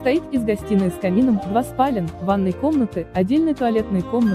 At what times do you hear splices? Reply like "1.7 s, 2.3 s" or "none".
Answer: none